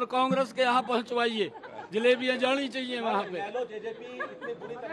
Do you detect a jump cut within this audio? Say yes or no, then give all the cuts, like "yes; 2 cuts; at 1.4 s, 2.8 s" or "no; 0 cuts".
no; 0 cuts